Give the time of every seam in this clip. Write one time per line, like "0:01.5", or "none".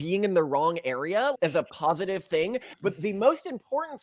0:02.7